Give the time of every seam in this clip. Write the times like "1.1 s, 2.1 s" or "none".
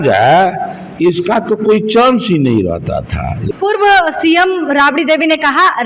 3.4 s